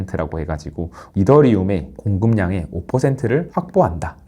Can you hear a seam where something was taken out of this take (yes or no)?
yes